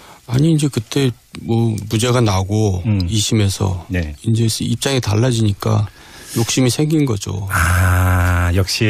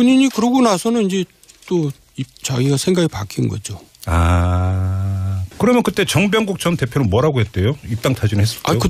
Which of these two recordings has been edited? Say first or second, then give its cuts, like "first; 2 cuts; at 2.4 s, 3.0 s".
second; 1 cut; at 3.5 s